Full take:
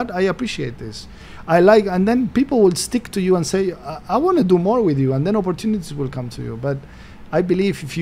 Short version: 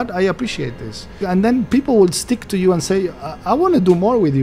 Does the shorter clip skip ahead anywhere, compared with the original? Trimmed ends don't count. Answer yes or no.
yes